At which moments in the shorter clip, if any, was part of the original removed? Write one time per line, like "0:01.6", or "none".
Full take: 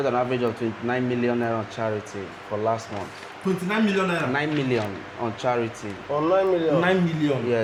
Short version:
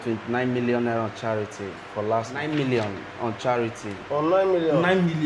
0:02.4